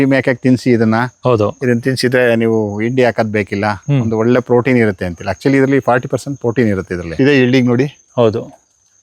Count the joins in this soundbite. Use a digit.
1